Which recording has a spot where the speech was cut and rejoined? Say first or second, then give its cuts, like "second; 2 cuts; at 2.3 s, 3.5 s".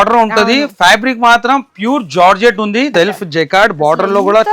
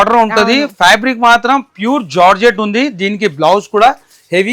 first; 1 cut; at 2.9 s